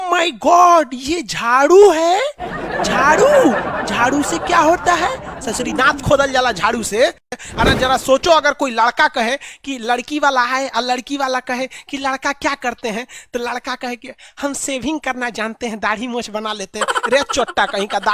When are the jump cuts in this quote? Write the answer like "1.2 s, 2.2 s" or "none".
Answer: 7.3 s